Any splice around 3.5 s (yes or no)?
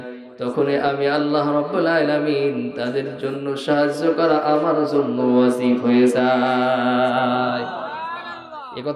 no